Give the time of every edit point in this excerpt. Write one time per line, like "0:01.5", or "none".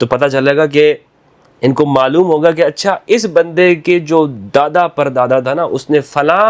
none